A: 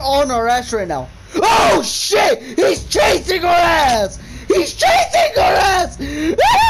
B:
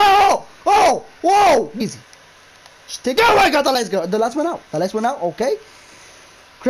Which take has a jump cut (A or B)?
B